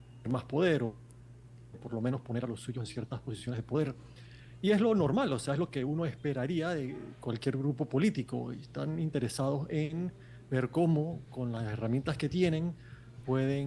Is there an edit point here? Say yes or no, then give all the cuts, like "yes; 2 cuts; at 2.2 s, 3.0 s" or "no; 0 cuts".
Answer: no; 0 cuts